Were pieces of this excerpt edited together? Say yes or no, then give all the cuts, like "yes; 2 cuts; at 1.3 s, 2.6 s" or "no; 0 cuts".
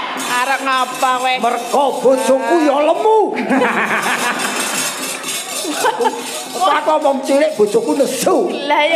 no; 0 cuts